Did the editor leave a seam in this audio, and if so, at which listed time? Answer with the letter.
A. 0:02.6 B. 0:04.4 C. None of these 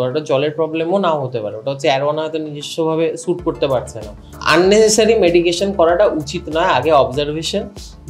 B